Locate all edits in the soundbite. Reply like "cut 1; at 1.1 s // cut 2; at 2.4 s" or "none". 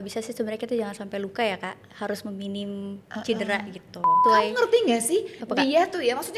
cut 1; at 4.2 s